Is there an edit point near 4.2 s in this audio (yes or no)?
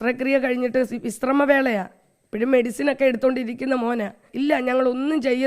yes